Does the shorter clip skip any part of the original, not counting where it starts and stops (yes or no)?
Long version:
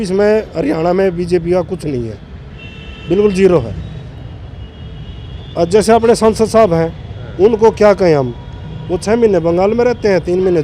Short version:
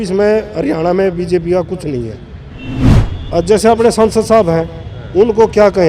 yes